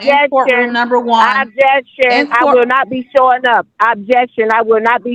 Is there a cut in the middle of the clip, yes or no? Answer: no